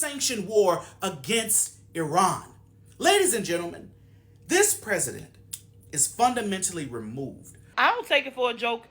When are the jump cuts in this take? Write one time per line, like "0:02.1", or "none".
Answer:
0:07.6